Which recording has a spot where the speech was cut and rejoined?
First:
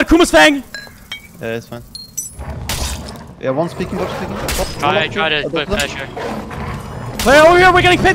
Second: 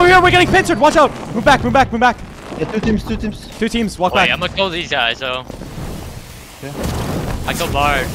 first; 1 cut; at 2.4 s

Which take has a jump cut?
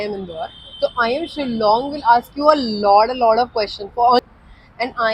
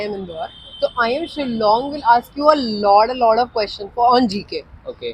first; 1 cut; at 4.2 s

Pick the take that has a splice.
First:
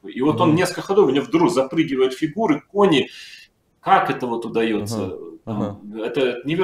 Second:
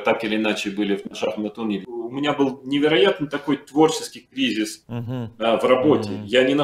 second; 1 cut; at 1.8 s

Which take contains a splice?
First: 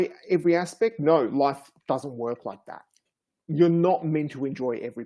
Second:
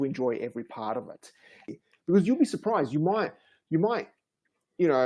second; 1 cut; at 1.7 s

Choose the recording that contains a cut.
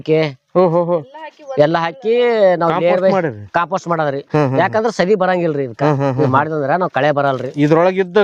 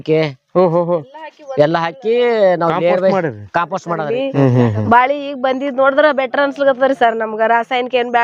second; 1 cut; at 4.1 s

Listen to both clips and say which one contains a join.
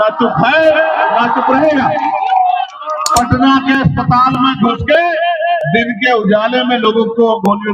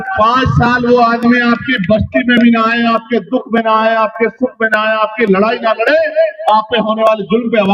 first; 1 cut; at 2.9 s

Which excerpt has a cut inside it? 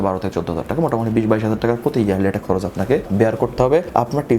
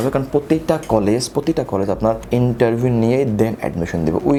first; 1 cut; at 3.0 s

